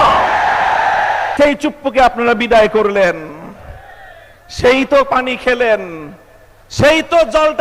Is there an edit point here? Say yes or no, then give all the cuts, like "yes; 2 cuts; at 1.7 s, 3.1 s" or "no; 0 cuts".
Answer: yes; 1 cut; at 1.3 s